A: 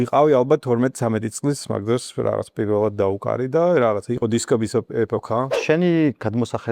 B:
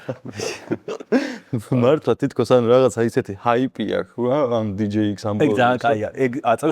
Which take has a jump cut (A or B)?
A